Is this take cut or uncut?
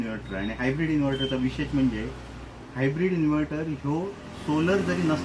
uncut